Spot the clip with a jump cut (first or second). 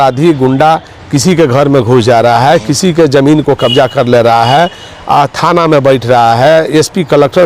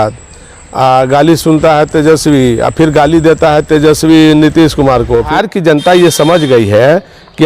second